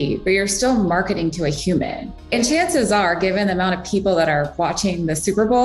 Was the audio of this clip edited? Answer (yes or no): yes